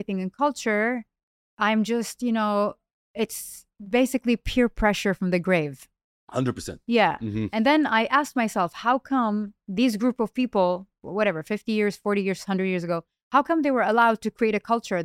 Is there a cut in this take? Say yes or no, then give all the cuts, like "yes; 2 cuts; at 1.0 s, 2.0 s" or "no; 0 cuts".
no; 0 cuts